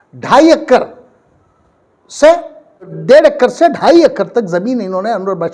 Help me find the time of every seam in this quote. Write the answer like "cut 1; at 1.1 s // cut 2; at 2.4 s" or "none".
cut 1; at 3.0 s